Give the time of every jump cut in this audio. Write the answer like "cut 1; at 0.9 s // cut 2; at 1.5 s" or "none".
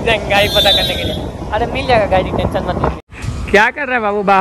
cut 1; at 3.0 s

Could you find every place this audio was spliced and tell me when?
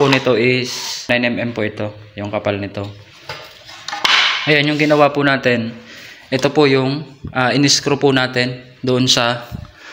cut 1; at 1.1 s

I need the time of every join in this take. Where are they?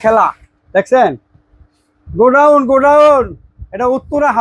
none

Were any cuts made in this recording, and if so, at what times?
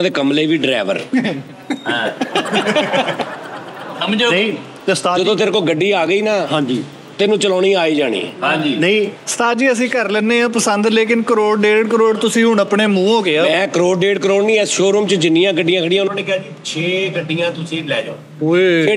none

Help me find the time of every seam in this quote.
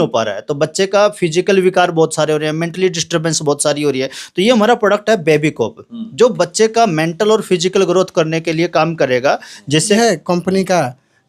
cut 1; at 9.9 s

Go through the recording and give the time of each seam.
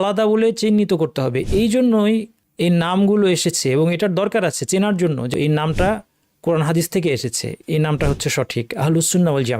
cut 1; at 2.4 s // cut 2; at 5.3 s

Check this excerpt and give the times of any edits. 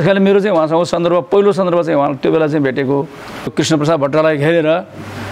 cut 1; at 3.5 s

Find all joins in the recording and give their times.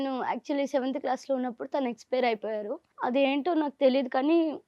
cut 1; at 2.8 s

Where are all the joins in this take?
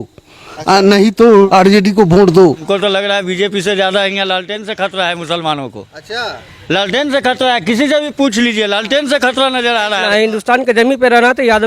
cut 1; at 1.5 s // cut 2; at 2.6 s // cut 3; at 10.0 s

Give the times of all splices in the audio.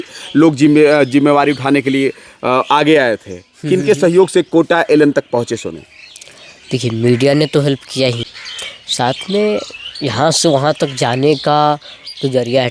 cut 1; at 8.3 s

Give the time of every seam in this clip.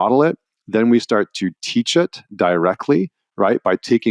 none

